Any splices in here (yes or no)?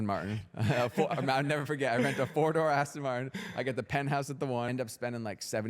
yes